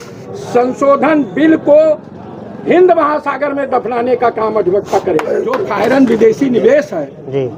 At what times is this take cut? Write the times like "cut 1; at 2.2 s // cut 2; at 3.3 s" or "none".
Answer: cut 1; at 5.7 s